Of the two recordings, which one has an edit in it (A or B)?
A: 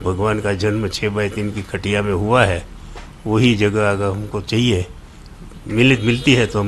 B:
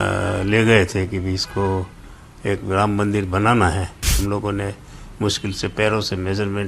B